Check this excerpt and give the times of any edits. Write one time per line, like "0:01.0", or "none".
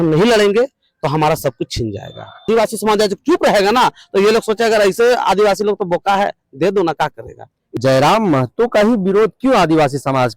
0:02.5
0:07.6